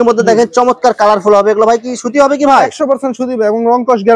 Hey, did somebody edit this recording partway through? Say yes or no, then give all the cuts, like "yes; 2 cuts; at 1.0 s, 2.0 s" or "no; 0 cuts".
no; 0 cuts